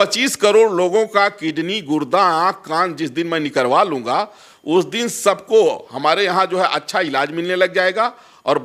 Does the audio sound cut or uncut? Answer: uncut